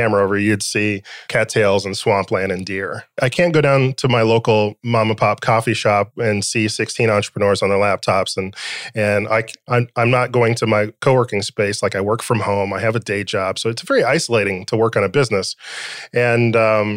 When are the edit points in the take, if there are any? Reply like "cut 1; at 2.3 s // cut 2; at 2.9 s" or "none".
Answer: cut 1; at 1.1 s // cut 2; at 3.1 s

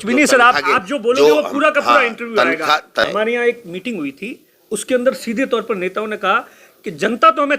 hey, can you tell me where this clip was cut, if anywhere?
cut 1; at 3.1 s

